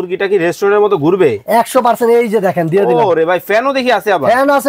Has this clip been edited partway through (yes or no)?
no